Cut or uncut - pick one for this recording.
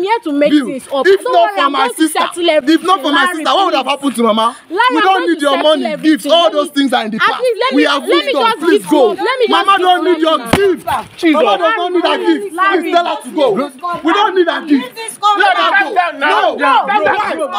uncut